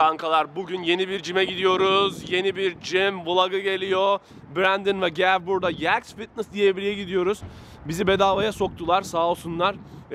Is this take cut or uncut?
uncut